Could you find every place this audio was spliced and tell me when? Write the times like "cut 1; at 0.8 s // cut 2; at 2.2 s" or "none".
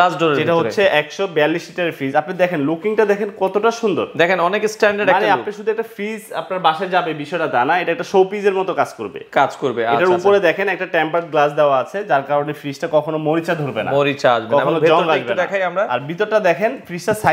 none